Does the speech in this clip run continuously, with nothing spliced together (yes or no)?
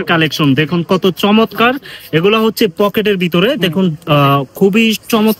yes